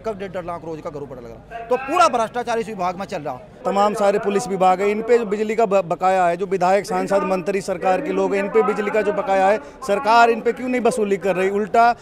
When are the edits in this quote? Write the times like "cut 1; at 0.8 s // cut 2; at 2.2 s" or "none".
cut 1; at 3.6 s